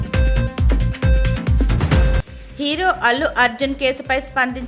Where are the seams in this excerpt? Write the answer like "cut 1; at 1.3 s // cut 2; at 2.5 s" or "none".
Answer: none